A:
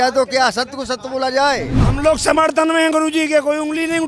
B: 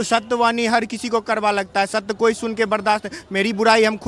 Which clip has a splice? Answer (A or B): A